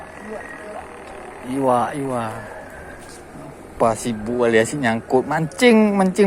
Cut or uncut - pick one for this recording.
uncut